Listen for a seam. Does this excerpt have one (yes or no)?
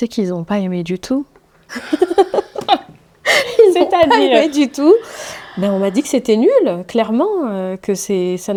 no